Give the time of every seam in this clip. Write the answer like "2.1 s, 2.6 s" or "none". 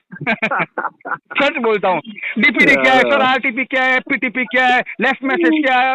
none